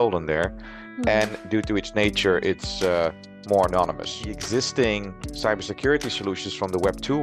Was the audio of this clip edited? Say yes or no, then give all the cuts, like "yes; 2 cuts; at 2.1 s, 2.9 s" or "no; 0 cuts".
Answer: yes; 1 cut; at 4.3 s